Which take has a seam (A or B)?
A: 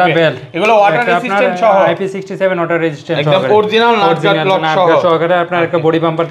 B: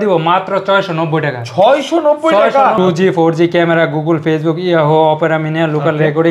B